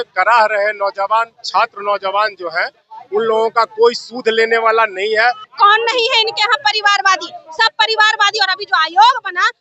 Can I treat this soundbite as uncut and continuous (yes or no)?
no